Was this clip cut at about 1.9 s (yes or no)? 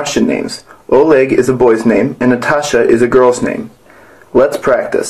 yes